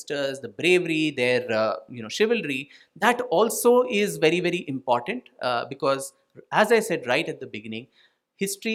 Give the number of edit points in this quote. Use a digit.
0